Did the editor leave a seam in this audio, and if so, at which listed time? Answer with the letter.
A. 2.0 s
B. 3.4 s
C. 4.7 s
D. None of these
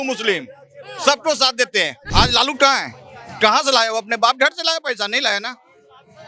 A